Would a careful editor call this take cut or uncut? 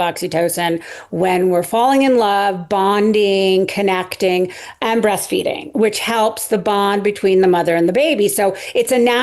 uncut